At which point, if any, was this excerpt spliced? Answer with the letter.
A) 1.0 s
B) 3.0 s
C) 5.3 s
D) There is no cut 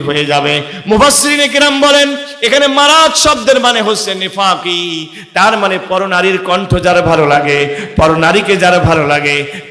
D